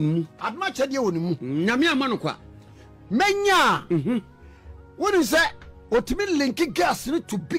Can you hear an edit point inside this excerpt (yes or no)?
no